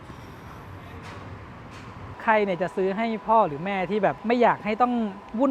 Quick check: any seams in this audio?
yes; 2 cuts; at 2.2 s, 4.2 s

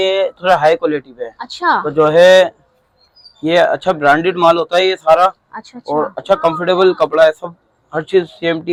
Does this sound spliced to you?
no; 0 cuts

